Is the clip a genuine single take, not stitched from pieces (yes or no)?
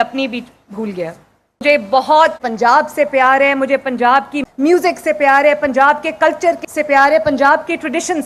no